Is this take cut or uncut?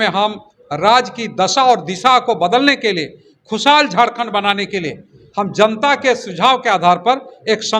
uncut